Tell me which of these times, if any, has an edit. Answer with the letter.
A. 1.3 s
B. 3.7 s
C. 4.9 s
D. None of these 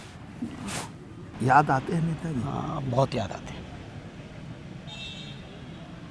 A